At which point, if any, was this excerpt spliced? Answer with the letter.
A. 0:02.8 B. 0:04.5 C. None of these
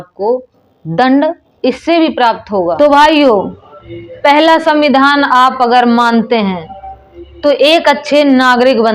A